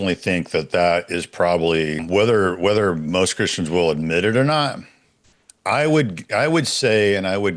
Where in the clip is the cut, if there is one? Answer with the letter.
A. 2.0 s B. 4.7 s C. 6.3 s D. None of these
A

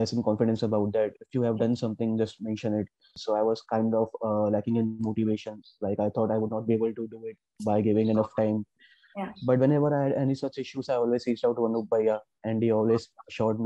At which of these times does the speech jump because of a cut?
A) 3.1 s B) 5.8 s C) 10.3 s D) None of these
A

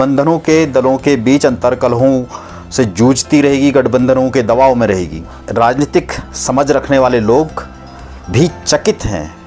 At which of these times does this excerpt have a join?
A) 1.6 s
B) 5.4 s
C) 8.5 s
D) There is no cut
B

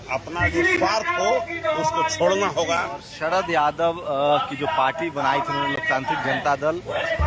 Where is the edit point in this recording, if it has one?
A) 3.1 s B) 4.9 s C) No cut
A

